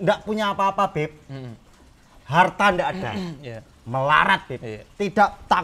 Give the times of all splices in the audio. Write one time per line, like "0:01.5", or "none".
none